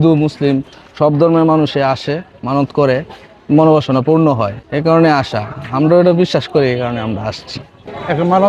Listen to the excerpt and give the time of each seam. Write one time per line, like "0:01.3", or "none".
none